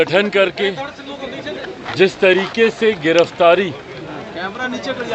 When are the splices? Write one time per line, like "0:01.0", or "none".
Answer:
none